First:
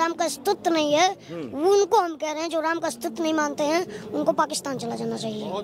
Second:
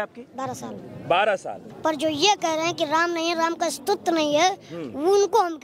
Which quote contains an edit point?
second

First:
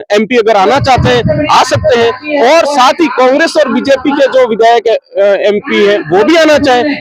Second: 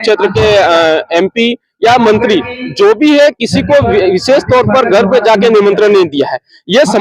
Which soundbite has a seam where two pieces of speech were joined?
second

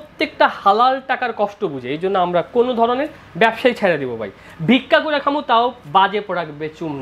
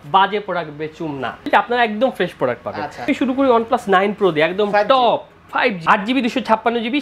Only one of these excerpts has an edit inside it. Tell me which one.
second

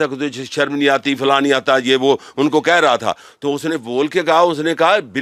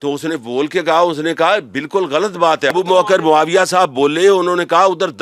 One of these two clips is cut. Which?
second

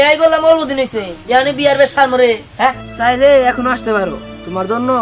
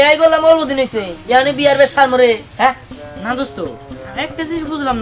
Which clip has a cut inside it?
first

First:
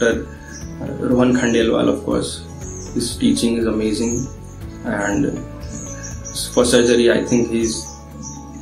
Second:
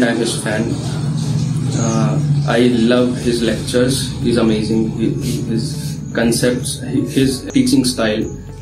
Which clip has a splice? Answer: second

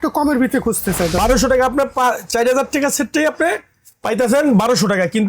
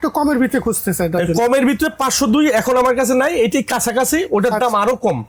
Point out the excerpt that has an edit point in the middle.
first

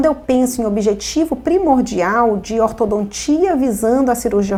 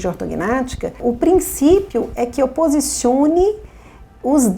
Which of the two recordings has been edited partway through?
second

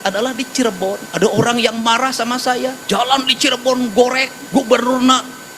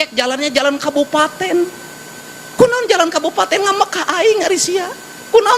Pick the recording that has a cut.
first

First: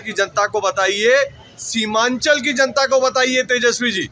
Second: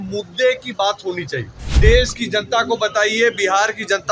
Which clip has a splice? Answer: second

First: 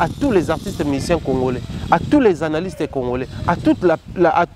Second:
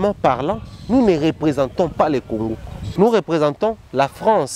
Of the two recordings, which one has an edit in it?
second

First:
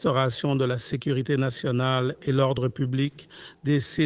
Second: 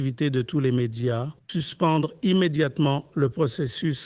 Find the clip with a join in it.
second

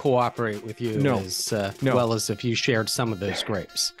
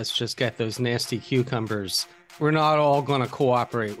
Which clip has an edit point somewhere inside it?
second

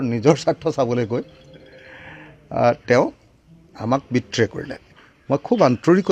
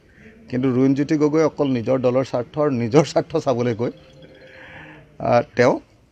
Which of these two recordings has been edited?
first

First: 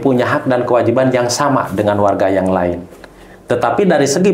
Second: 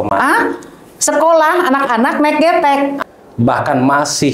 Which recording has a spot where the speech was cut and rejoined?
second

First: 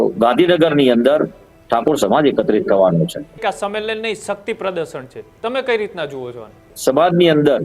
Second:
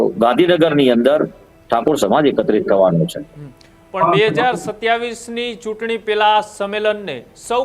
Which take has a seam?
first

